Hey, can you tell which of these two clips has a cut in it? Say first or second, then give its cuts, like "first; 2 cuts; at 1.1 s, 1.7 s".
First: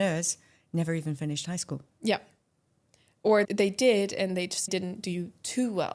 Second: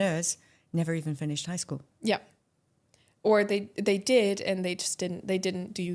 first; 2 cuts; at 3.5 s, 4.7 s